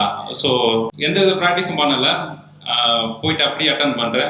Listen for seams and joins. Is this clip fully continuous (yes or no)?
no